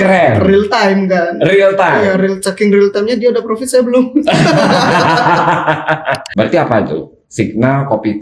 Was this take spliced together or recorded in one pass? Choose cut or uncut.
cut